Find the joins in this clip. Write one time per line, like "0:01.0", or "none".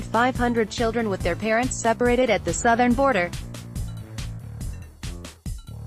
0:03.7